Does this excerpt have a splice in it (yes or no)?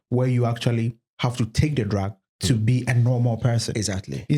no